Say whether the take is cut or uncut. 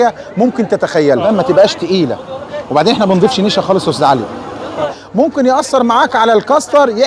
cut